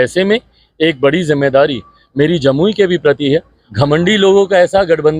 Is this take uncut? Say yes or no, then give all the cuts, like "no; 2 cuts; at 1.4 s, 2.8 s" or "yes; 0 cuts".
no; 1 cut; at 3.6 s